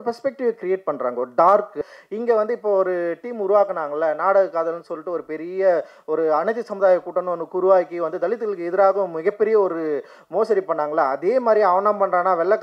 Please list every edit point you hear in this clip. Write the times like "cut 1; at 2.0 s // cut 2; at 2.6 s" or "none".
cut 1; at 1.8 s